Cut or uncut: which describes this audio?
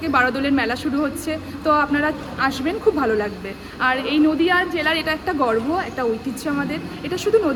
uncut